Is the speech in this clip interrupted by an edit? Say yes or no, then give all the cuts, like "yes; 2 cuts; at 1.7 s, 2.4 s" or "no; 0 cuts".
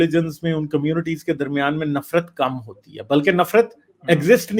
no; 0 cuts